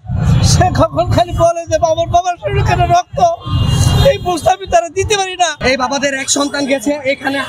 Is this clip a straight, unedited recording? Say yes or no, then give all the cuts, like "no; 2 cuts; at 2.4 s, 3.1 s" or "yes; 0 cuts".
no; 1 cut; at 5.6 s